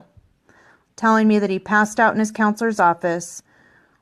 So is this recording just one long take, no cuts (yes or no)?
no